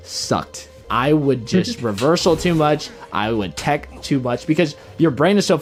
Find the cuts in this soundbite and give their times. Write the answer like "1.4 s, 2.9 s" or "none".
none